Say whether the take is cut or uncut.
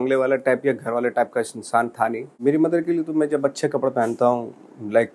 cut